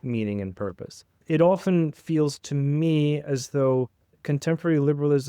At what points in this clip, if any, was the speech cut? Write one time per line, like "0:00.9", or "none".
0:01.2
0:04.1

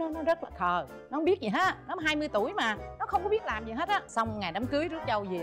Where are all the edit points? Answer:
0:02.9
0:04.1

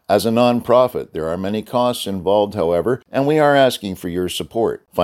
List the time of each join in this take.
0:03.0

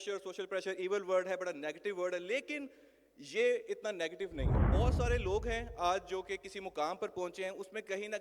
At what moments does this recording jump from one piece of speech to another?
0:04.6

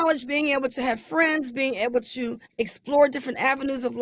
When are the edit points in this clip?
0:02.4

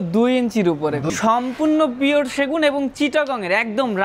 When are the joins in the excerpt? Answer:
0:01.1

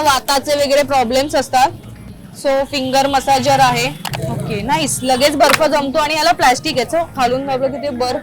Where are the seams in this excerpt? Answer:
0:04.0
0:07.1

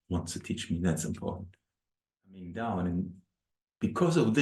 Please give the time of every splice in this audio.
0:02.5

